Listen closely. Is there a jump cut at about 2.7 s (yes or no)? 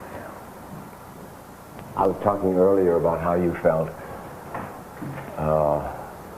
yes